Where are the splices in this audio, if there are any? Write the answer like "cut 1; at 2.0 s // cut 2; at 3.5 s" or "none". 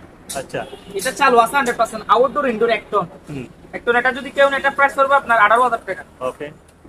none